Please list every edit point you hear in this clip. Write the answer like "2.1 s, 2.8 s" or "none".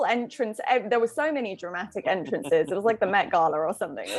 none